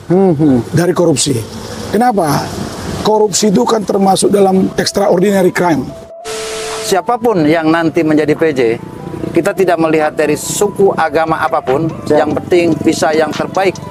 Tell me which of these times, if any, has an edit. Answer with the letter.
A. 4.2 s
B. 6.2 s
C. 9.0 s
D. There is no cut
B